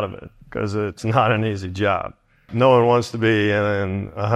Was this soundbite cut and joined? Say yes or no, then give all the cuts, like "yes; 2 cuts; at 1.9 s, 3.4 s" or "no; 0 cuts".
yes; 2 cuts; at 1.0 s, 2.5 s